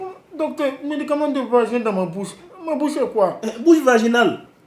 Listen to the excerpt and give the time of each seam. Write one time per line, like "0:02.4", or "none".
none